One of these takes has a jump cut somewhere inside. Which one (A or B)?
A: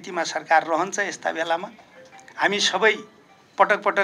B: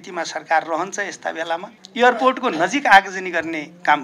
B